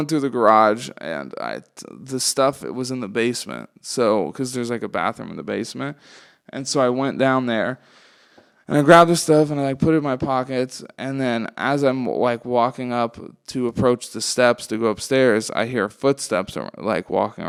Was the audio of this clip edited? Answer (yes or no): no